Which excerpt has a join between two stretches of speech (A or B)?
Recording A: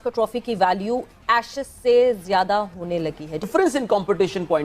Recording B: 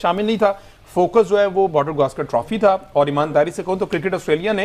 A